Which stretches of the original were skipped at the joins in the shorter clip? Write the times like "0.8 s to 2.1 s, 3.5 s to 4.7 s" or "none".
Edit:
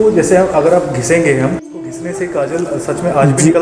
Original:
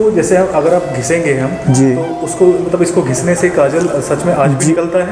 1.6 s to 2.9 s